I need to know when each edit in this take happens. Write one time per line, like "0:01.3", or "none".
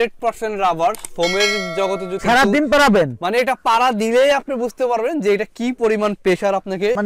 0:02.2